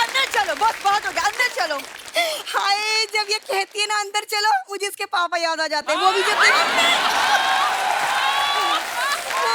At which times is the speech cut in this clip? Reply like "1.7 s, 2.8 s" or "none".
none